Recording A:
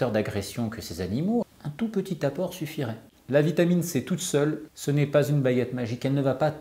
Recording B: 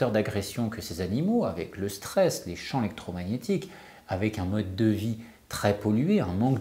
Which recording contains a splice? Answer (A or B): A